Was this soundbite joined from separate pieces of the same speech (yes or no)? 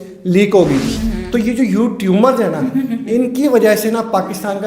yes